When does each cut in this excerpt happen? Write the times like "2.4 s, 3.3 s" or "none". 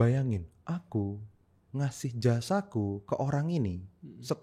none